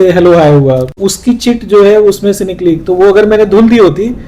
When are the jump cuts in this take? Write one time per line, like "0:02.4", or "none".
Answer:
0:01.0